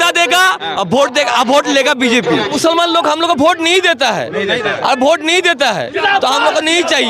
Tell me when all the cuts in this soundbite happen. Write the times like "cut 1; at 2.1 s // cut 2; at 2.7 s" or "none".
cut 1; at 2.5 s

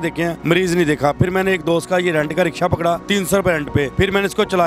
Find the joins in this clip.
cut 1; at 1.2 s

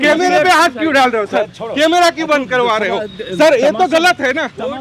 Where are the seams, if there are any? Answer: none

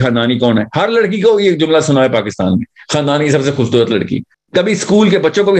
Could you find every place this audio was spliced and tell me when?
cut 1; at 4.4 s

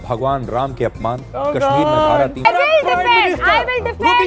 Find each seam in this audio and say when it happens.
cut 1; at 2.4 s

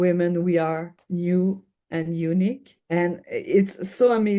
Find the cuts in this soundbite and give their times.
cut 1; at 1.0 s // cut 2; at 2.7 s

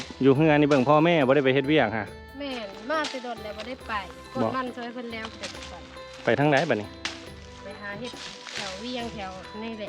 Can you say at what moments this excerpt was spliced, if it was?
none

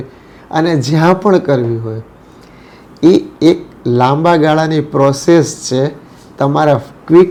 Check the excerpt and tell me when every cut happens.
none

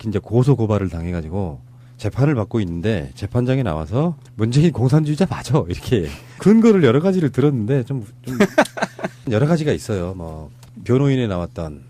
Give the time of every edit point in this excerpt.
cut 1; at 10.1 s

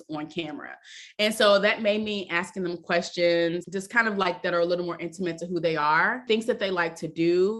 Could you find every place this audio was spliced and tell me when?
cut 1; at 3.7 s // cut 2; at 6.2 s

